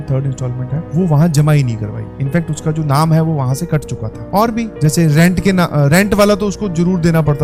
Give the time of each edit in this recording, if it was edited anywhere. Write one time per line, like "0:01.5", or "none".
none